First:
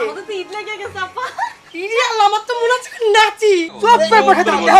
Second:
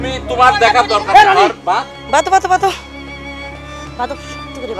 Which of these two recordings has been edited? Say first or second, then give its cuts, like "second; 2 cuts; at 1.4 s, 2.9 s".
first; 1 cut; at 3.8 s